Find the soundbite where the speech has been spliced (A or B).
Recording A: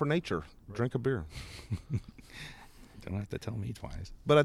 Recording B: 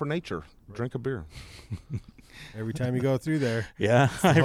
B